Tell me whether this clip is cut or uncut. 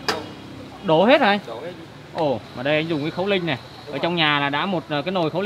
cut